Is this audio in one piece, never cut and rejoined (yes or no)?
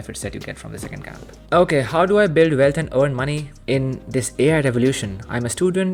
yes